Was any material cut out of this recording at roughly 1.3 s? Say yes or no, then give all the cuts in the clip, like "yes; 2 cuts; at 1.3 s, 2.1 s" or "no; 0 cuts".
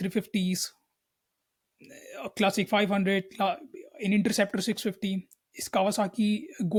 no; 0 cuts